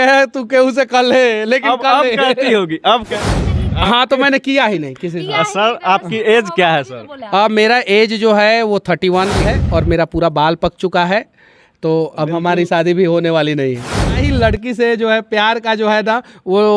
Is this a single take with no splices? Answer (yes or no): no